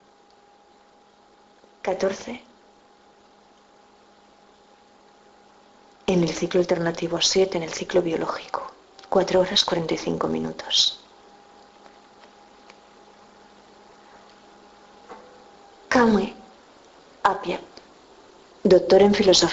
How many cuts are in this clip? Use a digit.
0